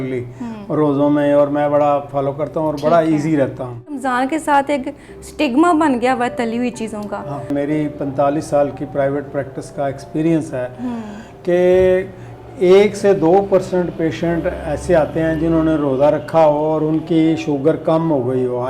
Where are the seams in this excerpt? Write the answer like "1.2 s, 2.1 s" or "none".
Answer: 4.0 s, 7.5 s